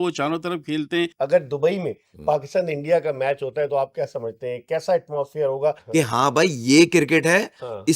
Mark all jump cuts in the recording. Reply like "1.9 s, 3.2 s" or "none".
1.1 s, 5.8 s